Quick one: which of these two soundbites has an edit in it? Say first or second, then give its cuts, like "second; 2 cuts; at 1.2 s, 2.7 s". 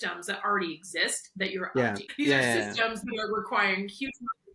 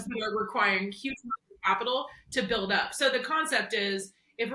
first; 1 cut; at 2.1 s